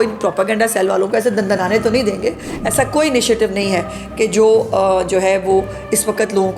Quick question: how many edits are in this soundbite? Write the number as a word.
one